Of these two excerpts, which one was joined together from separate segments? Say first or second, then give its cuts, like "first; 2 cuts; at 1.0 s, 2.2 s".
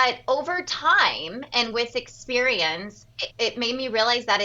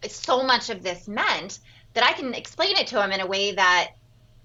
first; 1 cut; at 3.2 s